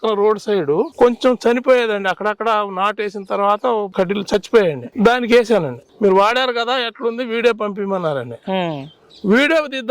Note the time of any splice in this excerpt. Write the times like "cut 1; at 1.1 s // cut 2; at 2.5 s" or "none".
cut 1; at 0.9 s // cut 2; at 4.8 s // cut 3; at 5.8 s